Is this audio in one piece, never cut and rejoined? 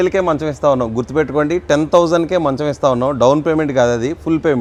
yes; 0 cuts

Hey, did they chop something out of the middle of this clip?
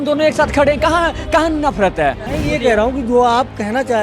yes; 1 cut; at 2.2 s

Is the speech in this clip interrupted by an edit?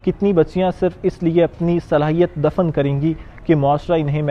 no; 0 cuts

